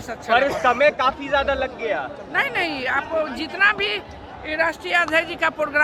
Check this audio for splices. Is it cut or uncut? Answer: uncut